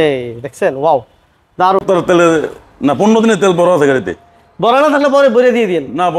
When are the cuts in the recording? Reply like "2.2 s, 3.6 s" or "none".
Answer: 1.8 s